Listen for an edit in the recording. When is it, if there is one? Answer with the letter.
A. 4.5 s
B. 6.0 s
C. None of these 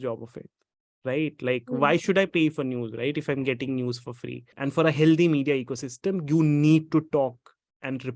A